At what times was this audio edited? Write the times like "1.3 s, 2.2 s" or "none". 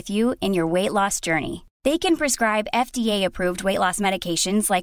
none